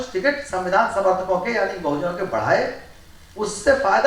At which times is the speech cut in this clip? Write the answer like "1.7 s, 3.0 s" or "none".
none